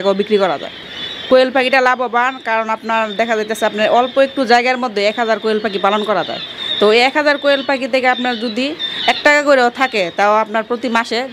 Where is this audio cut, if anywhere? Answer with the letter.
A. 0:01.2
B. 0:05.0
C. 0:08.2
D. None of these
A